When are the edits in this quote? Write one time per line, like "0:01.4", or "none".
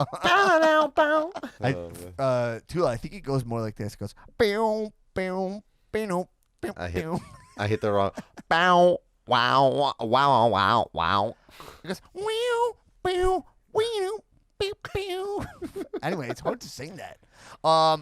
0:01.2